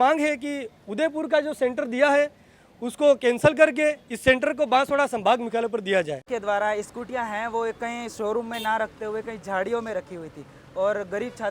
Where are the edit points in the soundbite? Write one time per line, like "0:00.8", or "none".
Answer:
0:06.3